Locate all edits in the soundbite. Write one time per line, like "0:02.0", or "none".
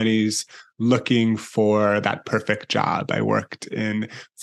none